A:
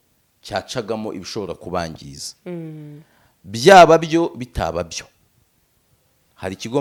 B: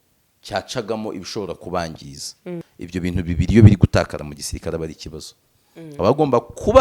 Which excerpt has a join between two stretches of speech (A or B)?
B